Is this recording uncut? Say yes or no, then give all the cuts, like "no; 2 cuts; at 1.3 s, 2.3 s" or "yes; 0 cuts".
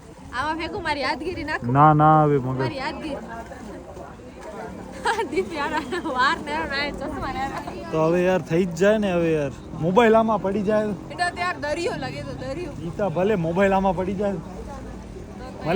yes; 0 cuts